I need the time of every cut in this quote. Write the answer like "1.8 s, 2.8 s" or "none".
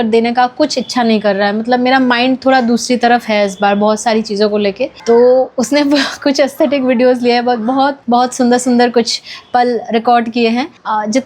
none